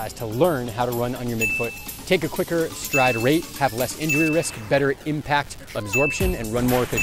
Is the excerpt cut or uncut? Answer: uncut